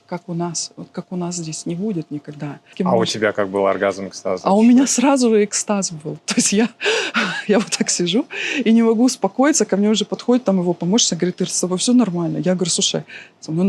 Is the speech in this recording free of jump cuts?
no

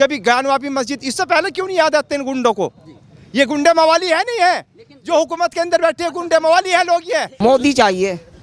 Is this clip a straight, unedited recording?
no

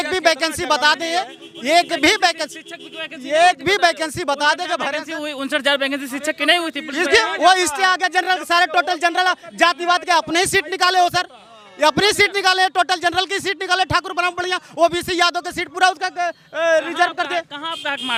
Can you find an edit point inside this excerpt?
no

